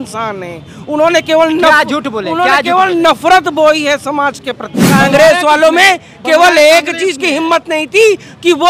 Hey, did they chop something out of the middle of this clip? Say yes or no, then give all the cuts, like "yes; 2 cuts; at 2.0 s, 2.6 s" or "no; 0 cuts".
yes; 1 cut; at 4.7 s